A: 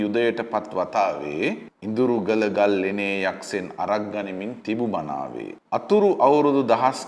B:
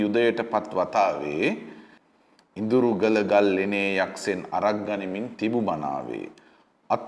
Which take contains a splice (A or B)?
A